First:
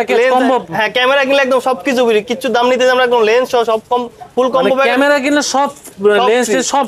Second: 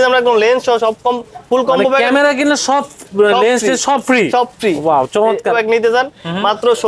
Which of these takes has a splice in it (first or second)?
second